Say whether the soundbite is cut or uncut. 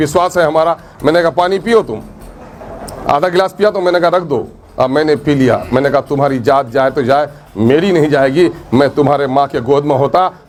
uncut